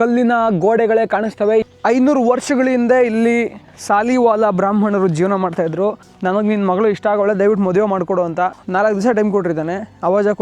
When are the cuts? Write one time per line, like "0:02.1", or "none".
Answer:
0:01.7
0:06.1
0:08.6